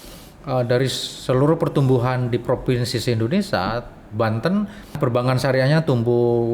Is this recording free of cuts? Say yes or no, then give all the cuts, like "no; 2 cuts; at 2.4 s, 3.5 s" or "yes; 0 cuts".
no; 1 cut; at 5.0 s